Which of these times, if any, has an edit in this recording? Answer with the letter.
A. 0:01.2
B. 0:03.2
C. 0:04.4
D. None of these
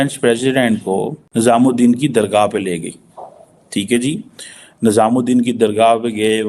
A